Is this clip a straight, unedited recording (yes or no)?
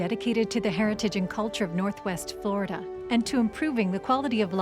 yes